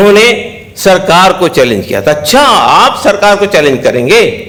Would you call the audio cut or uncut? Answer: uncut